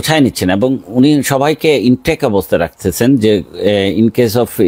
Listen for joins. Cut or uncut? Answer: uncut